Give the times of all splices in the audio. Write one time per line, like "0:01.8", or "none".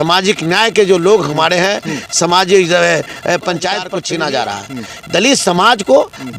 0:03.9